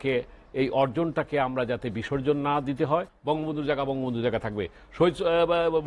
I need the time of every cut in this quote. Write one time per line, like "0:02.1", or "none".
0:03.1